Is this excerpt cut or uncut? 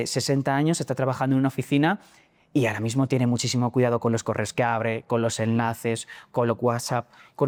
uncut